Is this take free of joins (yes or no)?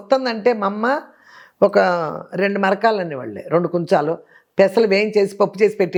yes